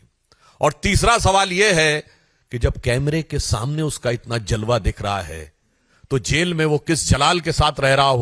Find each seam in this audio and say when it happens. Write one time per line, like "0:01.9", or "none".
none